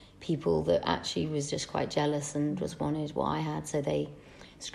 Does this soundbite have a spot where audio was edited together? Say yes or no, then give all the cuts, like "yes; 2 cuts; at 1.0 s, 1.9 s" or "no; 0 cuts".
no; 0 cuts